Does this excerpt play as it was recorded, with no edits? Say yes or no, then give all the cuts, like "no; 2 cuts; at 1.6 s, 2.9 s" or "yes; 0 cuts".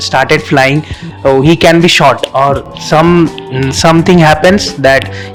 yes; 0 cuts